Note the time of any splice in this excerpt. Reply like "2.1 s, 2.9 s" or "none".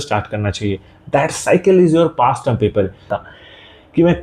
3.1 s